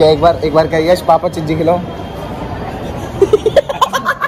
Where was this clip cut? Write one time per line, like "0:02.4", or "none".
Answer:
none